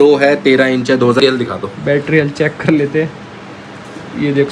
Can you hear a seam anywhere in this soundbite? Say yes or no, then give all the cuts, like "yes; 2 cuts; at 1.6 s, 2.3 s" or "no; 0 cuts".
yes; 1 cut; at 1.2 s